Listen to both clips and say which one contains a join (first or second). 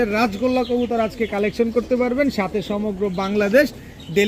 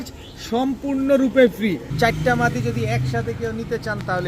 second